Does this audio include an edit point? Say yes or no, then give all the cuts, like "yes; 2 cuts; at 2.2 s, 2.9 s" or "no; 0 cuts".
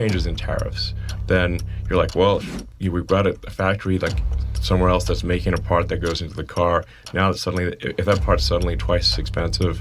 no; 0 cuts